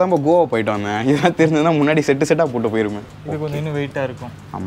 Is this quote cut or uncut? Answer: cut